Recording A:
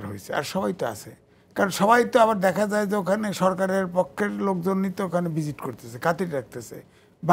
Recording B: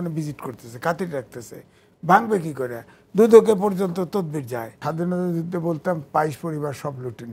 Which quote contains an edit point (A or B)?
B